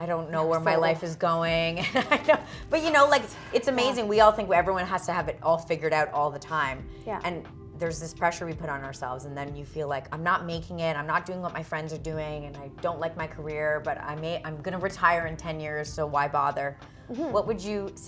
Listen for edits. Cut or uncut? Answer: uncut